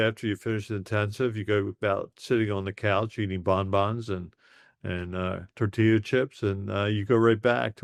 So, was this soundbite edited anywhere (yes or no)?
no